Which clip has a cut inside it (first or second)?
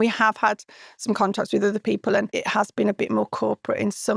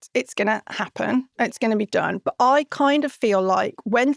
first